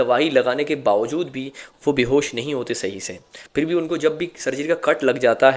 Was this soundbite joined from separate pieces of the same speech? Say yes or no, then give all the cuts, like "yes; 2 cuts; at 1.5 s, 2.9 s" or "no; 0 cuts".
no; 0 cuts